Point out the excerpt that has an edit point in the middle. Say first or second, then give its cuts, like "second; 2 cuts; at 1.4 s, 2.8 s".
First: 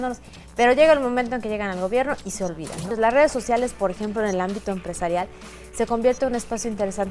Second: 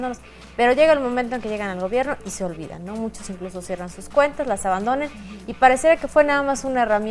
first; 1 cut; at 2.9 s